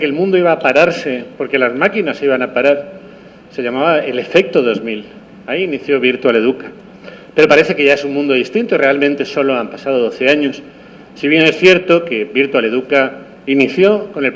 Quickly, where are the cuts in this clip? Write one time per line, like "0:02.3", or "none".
0:06.4

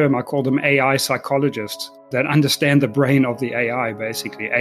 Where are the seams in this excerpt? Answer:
none

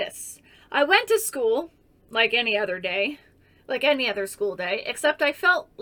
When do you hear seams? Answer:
none

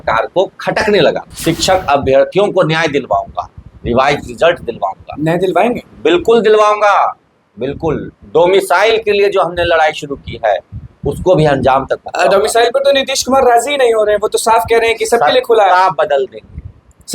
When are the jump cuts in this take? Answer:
0:01.3

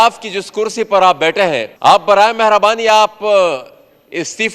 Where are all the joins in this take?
0:01.7

